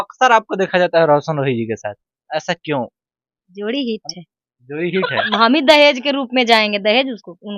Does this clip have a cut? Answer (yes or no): yes